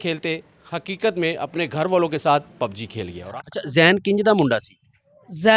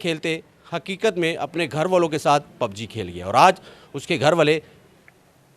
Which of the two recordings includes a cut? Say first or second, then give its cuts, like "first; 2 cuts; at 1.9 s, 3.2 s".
first; 1 cut; at 3.1 s